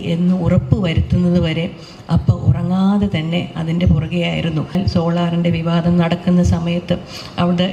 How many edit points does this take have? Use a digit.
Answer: 1